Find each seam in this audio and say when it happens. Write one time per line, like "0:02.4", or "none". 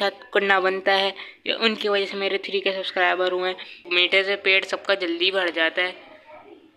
0:03.8

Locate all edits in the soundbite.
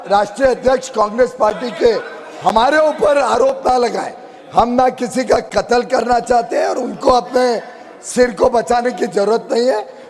none

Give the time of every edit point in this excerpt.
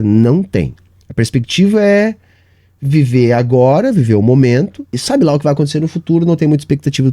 0:05.0

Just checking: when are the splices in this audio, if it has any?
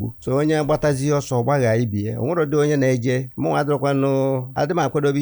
none

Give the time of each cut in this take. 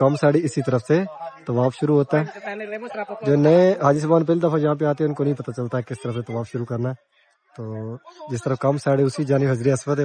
none

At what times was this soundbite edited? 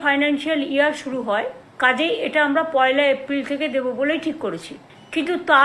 0:01.6

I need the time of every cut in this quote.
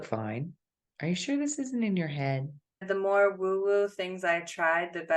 0:02.8

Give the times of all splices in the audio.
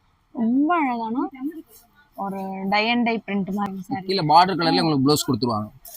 0:03.8

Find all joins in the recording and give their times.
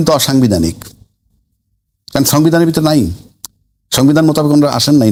none

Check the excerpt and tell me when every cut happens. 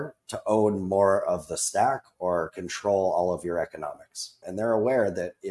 0:04.4

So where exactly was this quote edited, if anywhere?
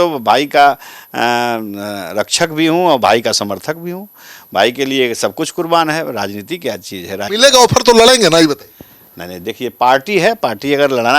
0:07.2

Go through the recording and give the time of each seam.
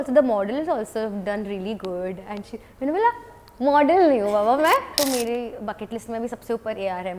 0:04.9

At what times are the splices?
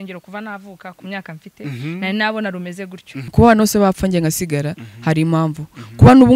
0:03.3

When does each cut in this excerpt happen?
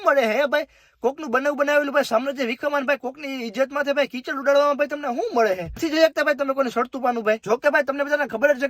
0:05.8
0:07.4

